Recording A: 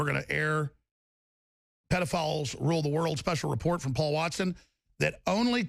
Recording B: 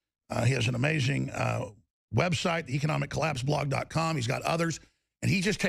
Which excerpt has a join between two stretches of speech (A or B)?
A